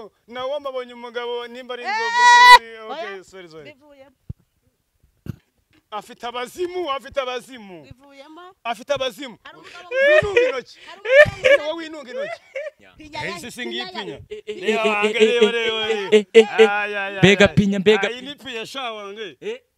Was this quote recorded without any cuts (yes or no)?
no